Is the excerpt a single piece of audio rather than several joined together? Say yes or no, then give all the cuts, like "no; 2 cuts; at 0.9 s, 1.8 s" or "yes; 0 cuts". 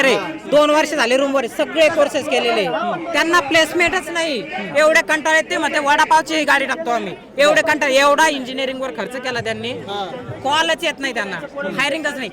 yes; 0 cuts